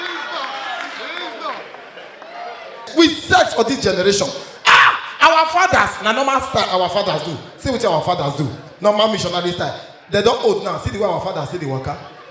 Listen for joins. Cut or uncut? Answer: cut